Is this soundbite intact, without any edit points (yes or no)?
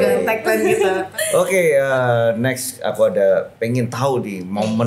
yes